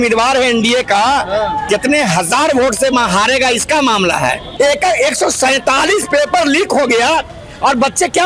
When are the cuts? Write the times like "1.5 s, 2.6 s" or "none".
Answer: 4.4 s